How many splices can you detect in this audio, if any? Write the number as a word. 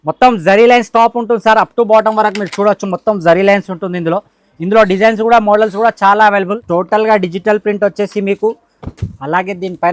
one